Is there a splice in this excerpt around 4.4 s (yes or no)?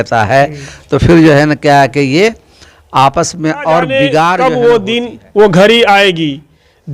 yes